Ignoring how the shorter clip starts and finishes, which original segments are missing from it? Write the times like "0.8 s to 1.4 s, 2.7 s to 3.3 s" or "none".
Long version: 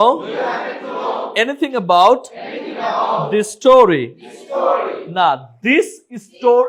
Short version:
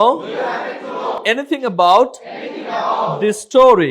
1.2 s to 1.3 s